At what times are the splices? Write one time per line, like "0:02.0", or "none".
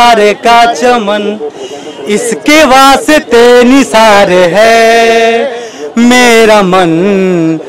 none